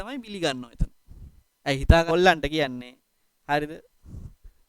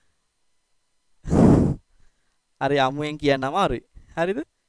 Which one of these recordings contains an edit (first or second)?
first